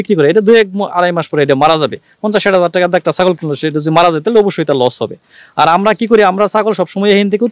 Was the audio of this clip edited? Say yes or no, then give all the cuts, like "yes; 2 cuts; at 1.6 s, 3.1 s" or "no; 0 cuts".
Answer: no; 0 cuts